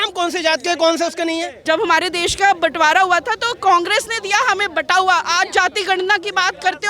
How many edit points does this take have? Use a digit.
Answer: 1